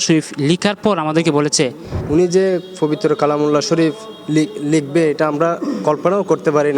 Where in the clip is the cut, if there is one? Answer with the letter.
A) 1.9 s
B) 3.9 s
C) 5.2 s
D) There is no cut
A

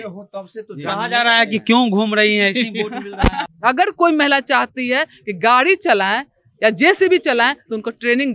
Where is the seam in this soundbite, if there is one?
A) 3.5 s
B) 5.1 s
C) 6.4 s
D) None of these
A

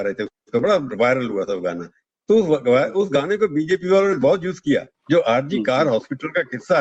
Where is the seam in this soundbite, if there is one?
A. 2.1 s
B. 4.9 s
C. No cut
B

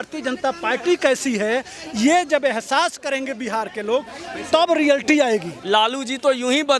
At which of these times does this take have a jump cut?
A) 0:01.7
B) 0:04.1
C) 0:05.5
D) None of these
C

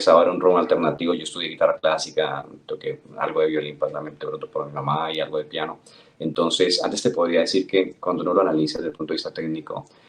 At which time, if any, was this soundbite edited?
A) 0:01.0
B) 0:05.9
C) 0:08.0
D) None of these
D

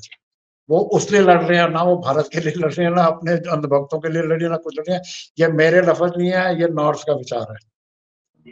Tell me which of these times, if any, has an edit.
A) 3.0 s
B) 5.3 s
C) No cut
C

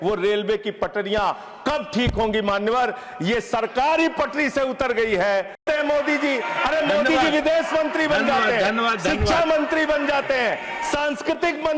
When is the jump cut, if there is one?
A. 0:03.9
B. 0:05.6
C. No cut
B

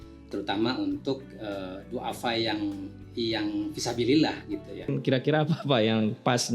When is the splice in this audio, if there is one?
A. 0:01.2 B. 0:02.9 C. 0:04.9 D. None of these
C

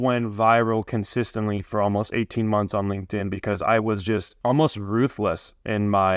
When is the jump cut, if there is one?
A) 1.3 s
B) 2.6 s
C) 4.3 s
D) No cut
C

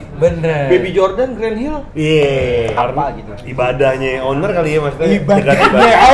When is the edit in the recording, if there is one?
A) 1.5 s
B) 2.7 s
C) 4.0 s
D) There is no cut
B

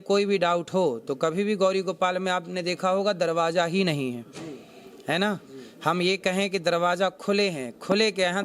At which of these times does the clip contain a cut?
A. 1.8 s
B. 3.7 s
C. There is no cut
C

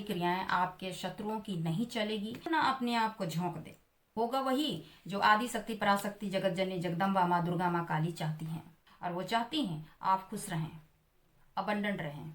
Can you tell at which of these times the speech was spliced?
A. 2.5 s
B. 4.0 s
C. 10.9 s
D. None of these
A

